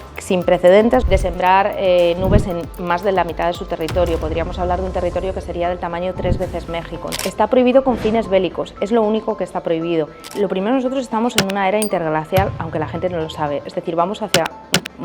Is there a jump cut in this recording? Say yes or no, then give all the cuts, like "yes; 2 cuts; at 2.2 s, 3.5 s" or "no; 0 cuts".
yes; 3 cuts; at 1.0 s, 7.2 s, 10.2 s